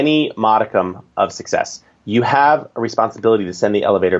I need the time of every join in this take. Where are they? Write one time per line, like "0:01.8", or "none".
none